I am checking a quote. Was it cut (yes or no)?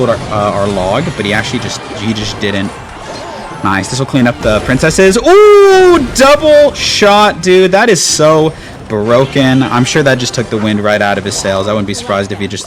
no